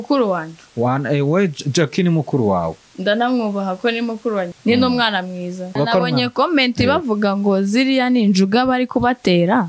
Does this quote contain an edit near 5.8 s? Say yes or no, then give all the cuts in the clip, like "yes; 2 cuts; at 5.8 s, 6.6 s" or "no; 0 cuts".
yes; 2 cuts; at 4.5 s, 5.8 s